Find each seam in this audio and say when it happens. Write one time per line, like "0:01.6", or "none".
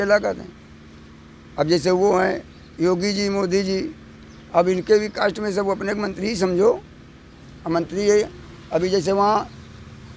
none